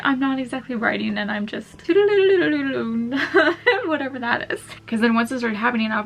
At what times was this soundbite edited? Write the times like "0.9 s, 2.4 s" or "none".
1.7 s, 4.7 s